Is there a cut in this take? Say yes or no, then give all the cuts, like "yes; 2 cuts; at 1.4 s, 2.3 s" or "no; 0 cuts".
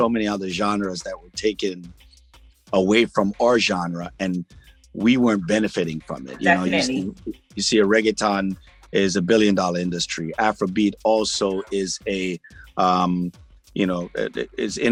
no; 0 cuts